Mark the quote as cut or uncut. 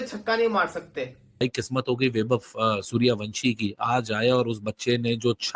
cut